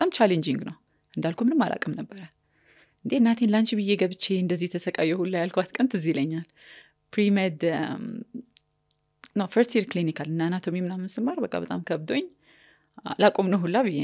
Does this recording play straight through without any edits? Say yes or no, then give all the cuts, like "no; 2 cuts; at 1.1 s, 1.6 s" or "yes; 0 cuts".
yes; 0 cuts